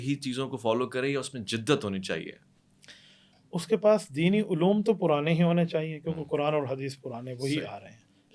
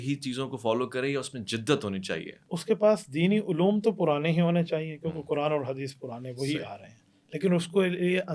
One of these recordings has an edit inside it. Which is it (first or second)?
second